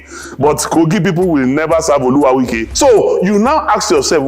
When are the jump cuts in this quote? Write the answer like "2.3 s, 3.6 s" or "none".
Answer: 2.6 s

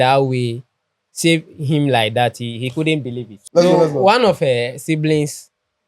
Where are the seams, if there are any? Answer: 3.3 s

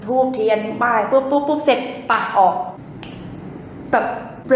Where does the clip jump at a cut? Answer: none

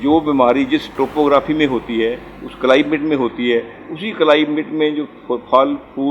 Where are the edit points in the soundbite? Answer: 0.9 s

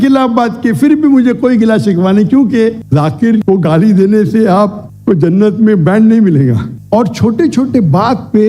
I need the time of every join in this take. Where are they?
2.8 s, 6.7 s

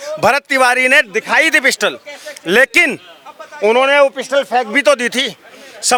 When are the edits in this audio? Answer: none

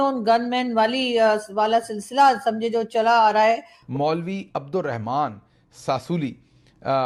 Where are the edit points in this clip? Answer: none

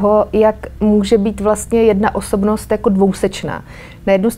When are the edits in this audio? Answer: none

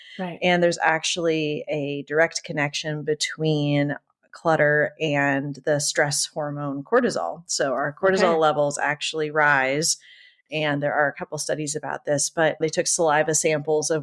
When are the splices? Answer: 12.6 s

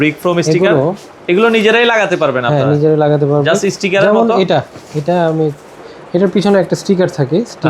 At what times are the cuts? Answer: none

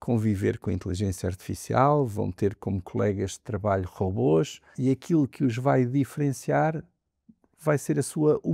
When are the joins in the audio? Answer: 4.7 s

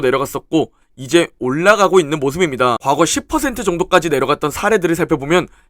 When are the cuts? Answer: 2.8 s

